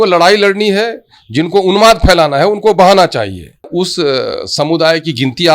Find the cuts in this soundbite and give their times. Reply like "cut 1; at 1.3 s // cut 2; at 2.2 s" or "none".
cut 1; at 3.7 s